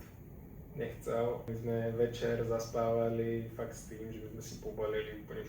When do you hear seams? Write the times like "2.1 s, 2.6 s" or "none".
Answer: 1.5 s